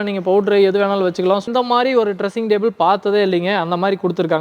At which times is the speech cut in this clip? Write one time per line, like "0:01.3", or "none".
0:01.4